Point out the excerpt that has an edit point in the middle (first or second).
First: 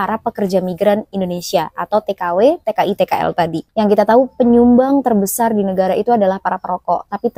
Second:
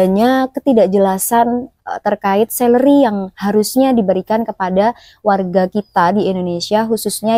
first